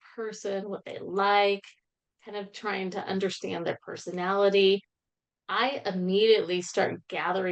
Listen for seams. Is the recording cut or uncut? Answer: uncut